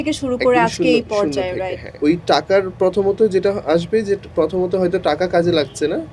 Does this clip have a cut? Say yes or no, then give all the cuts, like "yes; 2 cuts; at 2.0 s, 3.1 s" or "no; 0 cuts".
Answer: yes; 1 cut; at 1.9 s